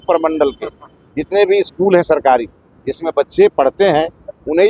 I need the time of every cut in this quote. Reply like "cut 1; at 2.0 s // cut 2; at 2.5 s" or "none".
none